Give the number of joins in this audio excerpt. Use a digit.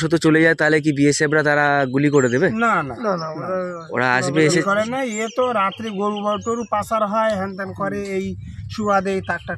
0